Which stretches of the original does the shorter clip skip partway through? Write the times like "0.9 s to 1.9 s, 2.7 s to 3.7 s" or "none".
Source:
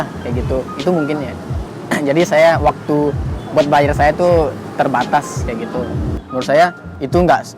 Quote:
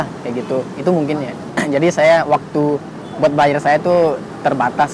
1.4 s to 1.7 s